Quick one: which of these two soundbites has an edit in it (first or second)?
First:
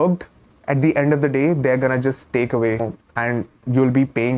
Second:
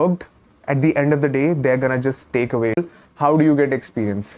second